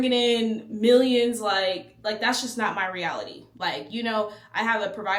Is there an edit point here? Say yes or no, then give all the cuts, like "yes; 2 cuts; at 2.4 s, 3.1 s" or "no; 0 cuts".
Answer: no; 0 cuts